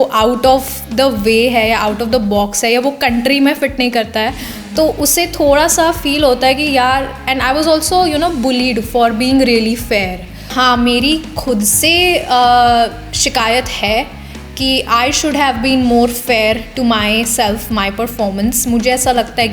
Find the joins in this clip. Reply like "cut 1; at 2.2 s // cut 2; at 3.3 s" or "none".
cut 1; at 10.5 s

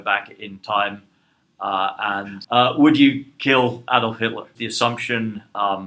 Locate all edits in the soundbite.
cut 1; at 2.3 s // cut 2; at 4.6 s

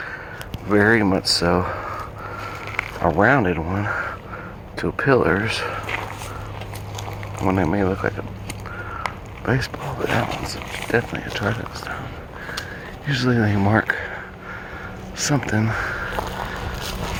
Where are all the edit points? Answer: none

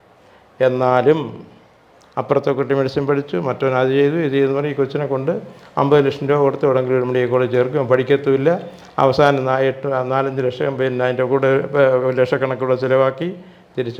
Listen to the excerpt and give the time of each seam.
none

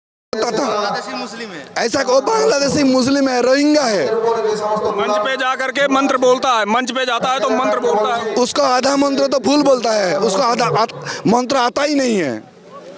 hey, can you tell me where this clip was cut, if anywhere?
none

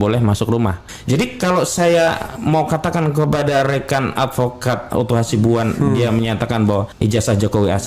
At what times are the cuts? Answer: cut 1; at 0.9 s // cut 2; at 6.9 s

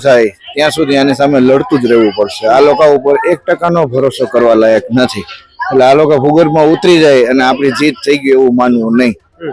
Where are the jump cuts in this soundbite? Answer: none

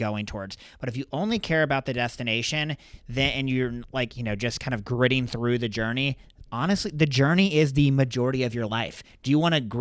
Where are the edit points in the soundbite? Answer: none

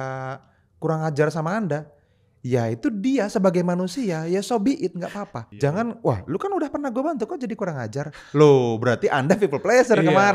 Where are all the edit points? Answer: cut 1; at 5.4 s

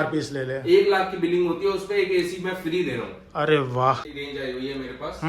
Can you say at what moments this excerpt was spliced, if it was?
cut 1; at 4.0 s

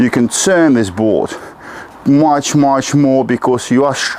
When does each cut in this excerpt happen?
none

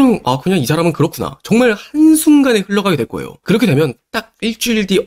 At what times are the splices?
none

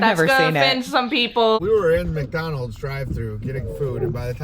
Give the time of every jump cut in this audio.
cut 1; at 1.6 s

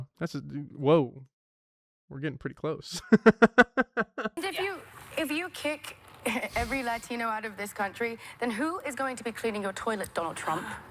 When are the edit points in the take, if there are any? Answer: cut 1; at 4.4 s

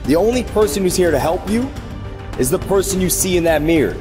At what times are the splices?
none

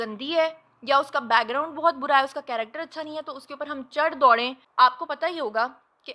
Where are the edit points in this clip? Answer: cut 1; at 4.6 s

